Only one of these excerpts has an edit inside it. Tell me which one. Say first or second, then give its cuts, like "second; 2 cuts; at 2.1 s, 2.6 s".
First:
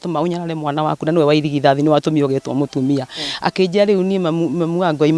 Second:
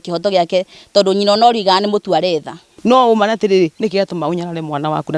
second; 1 cut; at 2.7 s